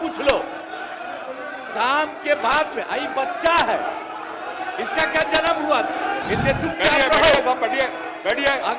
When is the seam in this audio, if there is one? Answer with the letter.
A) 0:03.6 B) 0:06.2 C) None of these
B